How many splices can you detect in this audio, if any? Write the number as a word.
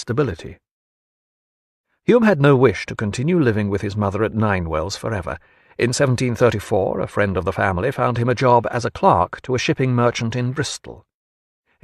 one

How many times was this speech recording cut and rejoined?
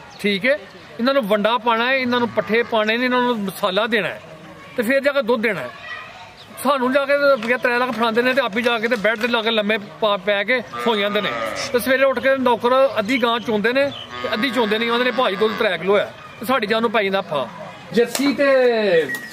one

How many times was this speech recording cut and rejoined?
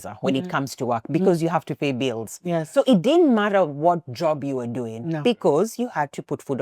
one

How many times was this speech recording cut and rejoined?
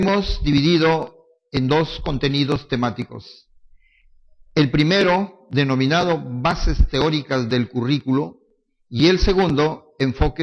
one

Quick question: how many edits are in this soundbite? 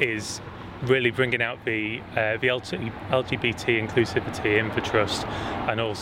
zero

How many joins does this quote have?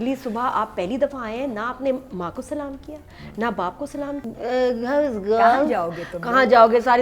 one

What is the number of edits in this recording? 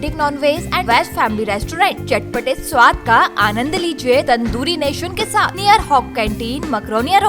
three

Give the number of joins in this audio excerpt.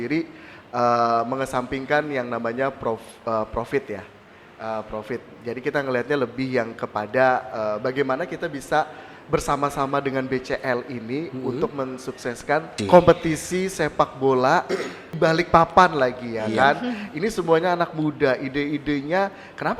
two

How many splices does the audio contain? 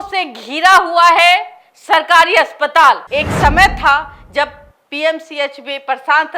one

